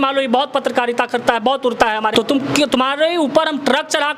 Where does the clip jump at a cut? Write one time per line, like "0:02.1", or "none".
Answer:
0:02.1

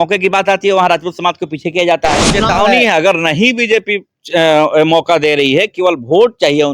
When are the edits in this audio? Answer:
0:02.3

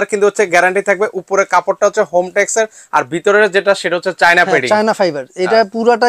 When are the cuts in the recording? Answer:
none

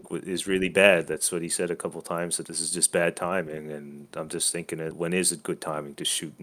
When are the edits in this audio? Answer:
0:02.4
0:04.9

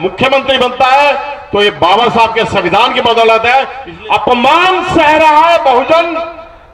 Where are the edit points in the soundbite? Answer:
0:03.8

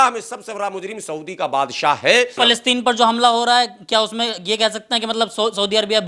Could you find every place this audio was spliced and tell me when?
0:02.4

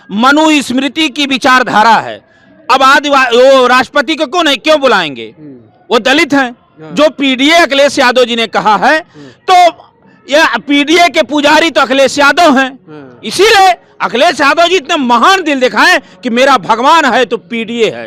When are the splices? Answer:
none

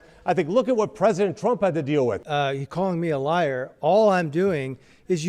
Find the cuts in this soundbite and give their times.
0:02.2

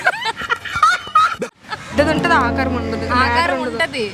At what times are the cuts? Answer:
0:01.9

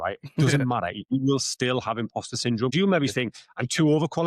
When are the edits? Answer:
0:02.7

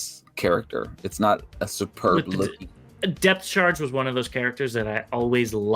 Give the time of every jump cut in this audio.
0:02.6

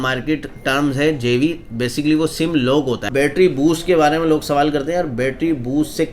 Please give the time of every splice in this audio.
0:03.1

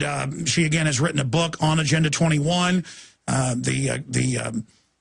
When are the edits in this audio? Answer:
0:03.0

